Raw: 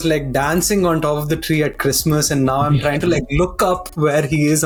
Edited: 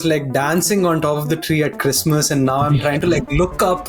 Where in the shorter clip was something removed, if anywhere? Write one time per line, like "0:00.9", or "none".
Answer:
none